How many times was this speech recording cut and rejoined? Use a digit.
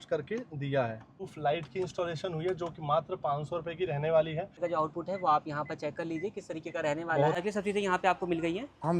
3